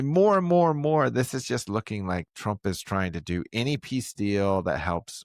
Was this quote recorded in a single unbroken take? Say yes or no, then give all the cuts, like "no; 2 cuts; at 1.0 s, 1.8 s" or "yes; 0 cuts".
yes; 0 cuts